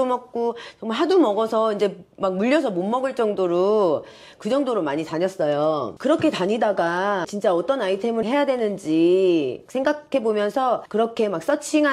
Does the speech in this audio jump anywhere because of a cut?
yes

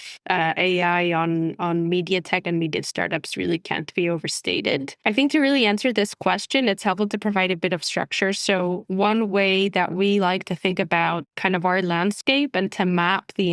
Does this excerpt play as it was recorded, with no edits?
yes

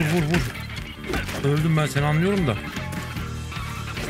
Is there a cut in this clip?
no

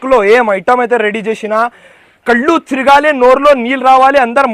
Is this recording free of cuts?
yes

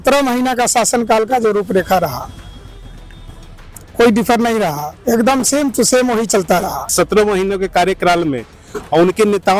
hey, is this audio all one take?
no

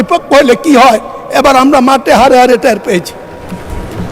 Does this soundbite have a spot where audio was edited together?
no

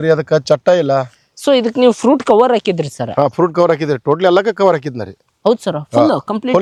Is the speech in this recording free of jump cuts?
yes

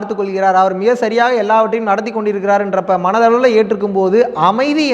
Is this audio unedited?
yes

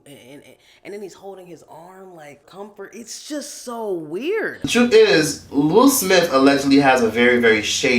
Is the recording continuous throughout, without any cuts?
no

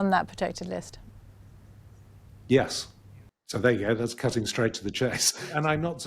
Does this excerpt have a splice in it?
yes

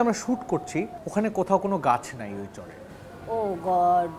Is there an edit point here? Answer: yes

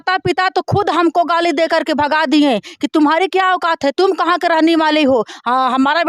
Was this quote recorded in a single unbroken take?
yes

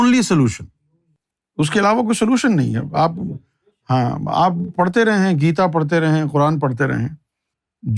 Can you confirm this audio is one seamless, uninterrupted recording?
yes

